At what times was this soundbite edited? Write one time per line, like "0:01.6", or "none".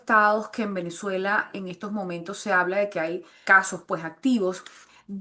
0:03.4